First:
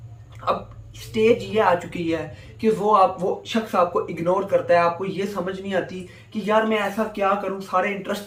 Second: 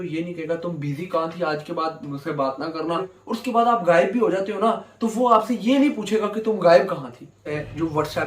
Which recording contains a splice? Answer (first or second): second